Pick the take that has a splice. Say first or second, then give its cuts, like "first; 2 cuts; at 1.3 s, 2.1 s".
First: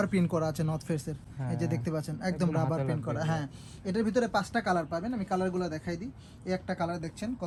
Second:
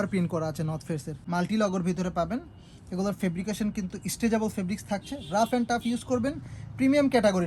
second; 1 cut; at 1.1 s